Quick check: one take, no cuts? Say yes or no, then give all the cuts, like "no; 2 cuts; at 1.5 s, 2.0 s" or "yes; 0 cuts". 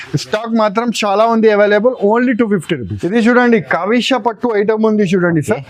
yes; 0 cuts